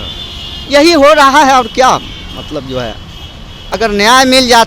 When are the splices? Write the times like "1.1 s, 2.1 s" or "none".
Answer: 3.7 s